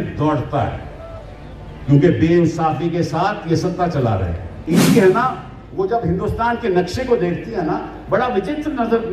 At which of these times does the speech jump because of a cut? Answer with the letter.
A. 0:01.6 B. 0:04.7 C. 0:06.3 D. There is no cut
B